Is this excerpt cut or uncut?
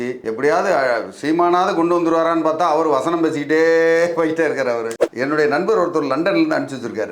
cut